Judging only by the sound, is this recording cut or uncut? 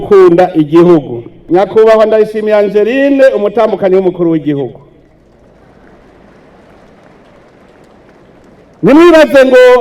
cut